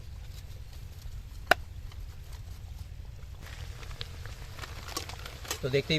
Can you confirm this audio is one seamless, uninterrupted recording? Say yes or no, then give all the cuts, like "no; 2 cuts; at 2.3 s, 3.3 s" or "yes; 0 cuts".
no; 1 cut; at 3.3 s